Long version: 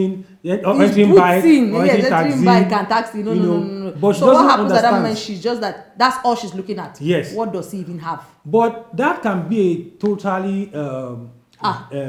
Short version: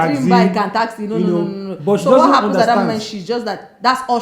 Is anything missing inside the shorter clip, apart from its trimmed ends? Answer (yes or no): no